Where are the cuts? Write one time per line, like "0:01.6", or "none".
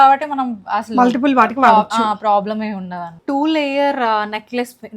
0:03.2